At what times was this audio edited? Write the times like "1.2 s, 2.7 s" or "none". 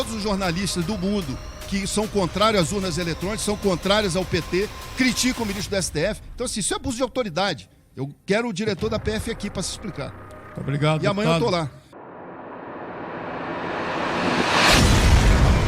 11.9 s